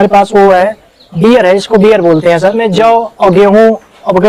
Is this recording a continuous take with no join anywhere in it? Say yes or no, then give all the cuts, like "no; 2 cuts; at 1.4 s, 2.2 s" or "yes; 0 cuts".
no; 1 cut; at 2.6 s